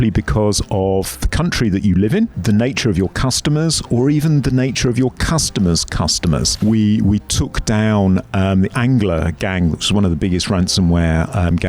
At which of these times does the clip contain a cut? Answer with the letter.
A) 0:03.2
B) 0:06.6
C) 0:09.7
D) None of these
B